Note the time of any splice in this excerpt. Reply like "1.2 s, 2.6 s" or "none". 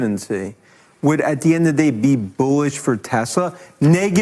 none